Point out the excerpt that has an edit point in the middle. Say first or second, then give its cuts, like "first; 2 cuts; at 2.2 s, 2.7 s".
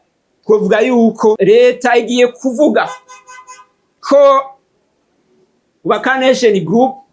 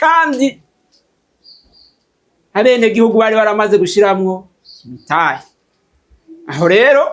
first; 1 cut; at 1.4 s